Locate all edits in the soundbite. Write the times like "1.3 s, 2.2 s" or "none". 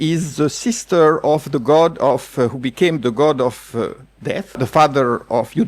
4.6 s